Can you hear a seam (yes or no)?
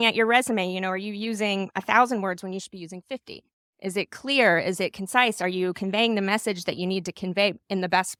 no